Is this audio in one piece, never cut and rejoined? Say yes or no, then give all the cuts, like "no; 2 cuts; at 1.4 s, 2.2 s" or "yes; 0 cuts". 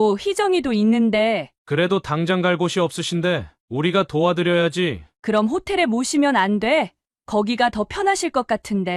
no; 1 cut; at 1.5 s